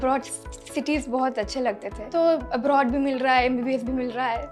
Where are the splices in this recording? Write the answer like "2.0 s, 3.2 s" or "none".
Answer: 2.0 s